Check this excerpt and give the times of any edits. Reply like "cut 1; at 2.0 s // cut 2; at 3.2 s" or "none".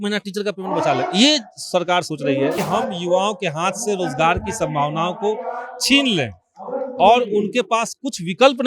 cut 1; at 2.6 s